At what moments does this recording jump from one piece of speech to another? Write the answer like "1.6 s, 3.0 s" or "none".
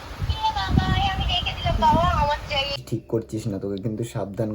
2.9 s